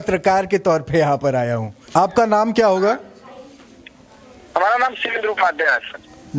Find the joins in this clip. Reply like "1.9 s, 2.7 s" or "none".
1.9 s